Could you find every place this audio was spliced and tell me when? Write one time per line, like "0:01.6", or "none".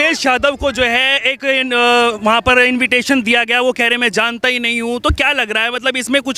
none